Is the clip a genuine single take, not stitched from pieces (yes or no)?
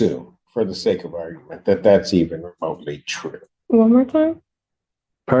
no